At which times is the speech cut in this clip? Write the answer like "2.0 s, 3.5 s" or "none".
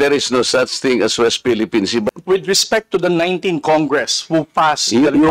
2.1 s